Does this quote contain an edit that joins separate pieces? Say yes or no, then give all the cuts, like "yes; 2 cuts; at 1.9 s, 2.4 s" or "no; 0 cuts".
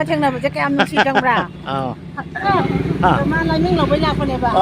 yes; 1 cut; at 2.5 s